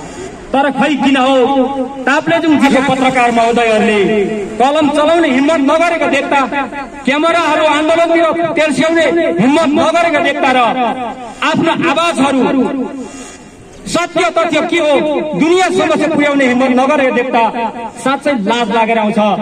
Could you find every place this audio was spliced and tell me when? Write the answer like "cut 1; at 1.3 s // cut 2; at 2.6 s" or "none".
cut 1; at 2.7 s

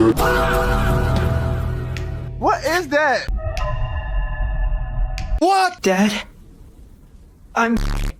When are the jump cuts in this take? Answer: none

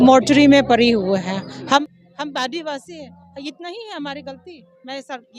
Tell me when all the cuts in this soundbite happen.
cut 1; at 1.8 s

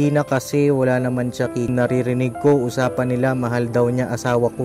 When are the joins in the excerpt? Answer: cut 1; at 1.7 s

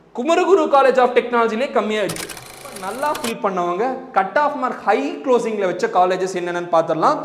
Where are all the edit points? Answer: cut 1; at 2.7 s

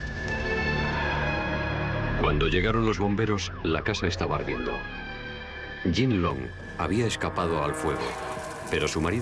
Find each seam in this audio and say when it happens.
cut 1; at 6.4 s

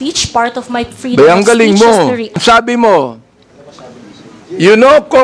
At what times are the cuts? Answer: cut 1; at 2.4 s

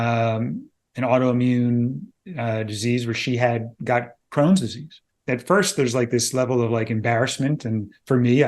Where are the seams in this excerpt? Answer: cut 1; at 5.1 s

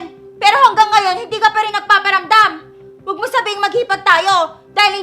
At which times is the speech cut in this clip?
none

